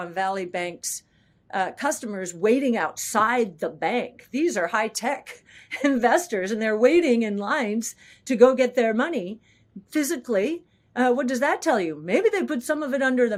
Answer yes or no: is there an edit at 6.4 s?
no